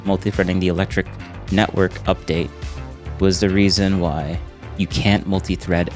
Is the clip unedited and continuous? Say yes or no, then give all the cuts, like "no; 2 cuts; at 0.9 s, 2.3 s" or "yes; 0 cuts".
yes; 0 cuts